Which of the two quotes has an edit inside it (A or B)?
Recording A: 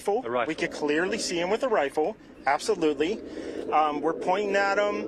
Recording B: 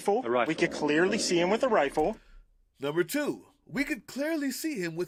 A